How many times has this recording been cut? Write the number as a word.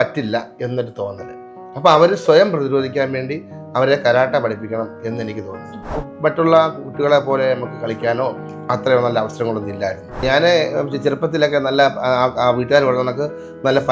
two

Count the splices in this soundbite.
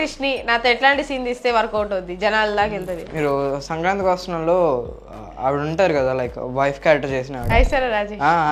one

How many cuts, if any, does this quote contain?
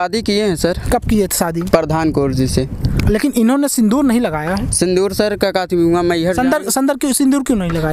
zero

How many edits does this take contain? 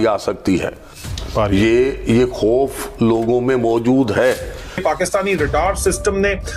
one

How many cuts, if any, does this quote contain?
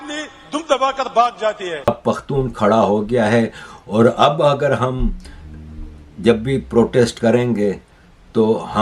one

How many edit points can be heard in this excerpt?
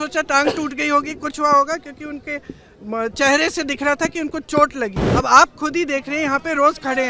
one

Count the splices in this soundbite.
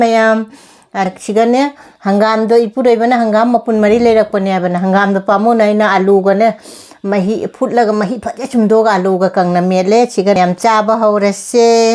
two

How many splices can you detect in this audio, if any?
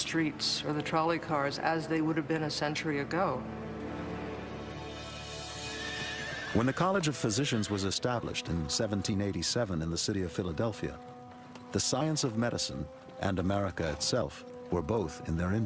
one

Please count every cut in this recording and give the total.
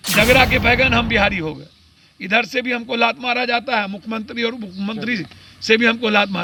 zero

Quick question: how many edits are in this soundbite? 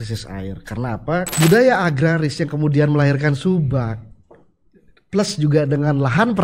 one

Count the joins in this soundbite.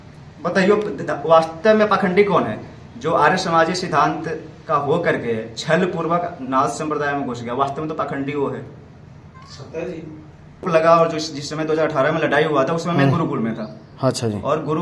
one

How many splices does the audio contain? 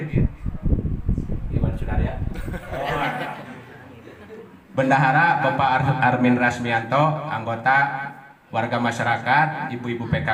zero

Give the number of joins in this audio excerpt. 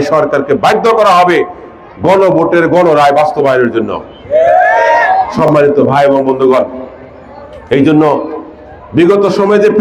zero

